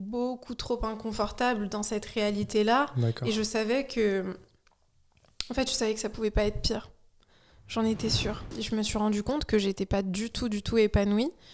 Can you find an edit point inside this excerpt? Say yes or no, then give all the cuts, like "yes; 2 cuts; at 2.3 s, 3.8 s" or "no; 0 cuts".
yes; 1 cut; at 8.5 s